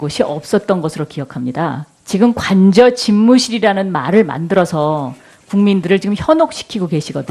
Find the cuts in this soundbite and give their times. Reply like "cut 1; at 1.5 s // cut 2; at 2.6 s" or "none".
cut 1; at 1.6 s